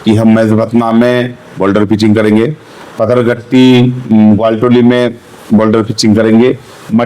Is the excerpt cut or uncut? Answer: uncut